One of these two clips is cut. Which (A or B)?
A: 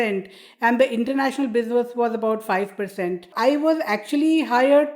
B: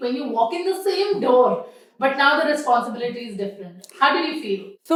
A